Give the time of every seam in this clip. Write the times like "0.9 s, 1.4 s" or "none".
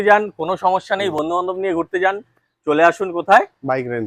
none

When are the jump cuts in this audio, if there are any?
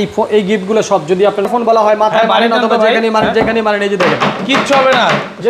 1.5 s

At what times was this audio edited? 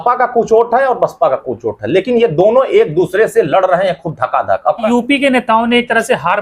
4.8 s

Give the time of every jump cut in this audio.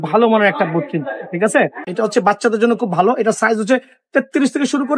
1.8 s

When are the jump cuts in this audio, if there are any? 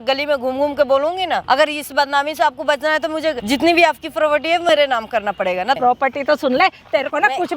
1.4 s, 3.4 s, 5.8 s

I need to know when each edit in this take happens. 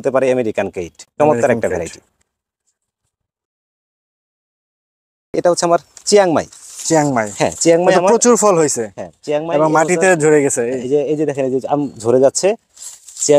none

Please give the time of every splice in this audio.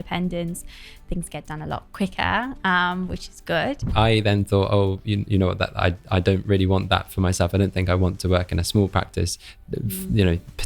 3.9 s

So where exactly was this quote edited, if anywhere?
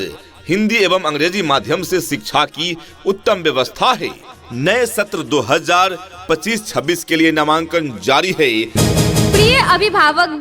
4.3 s, 8.7 s

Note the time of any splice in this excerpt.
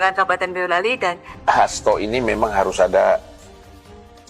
1.3 s

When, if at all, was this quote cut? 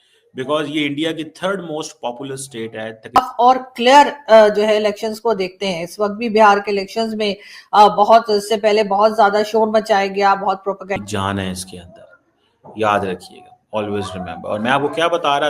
3.2 s, 10.9 s

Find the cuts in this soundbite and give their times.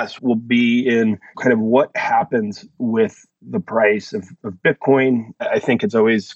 none

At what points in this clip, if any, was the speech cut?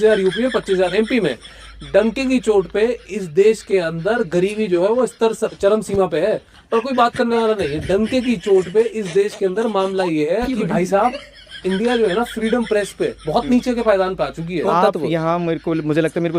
14.7 s

